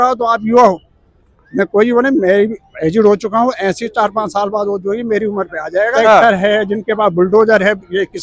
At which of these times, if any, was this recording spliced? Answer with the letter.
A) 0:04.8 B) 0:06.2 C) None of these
B